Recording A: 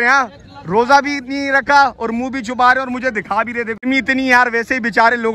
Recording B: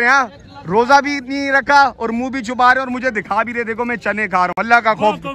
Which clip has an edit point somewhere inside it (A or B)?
A